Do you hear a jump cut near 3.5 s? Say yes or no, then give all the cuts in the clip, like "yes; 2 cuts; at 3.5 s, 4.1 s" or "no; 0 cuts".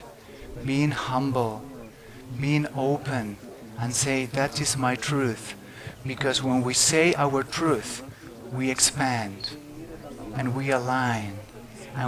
no; 0 cuts